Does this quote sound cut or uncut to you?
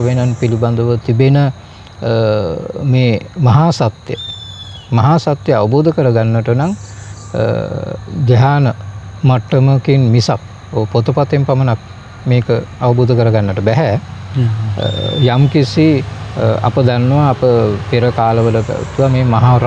uncut